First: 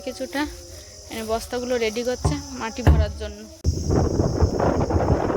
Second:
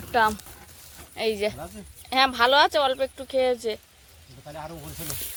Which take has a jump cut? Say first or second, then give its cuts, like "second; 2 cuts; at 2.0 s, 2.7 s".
first; 1 cut; at 3.6 s